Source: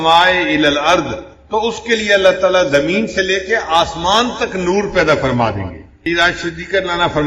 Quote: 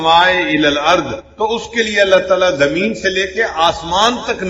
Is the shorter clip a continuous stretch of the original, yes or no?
no